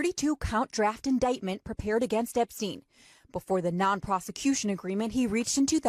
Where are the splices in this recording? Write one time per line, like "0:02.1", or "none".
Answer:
none